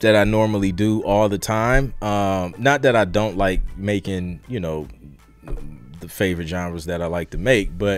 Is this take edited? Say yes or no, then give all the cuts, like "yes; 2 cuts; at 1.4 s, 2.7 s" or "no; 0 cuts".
no; 0 cuts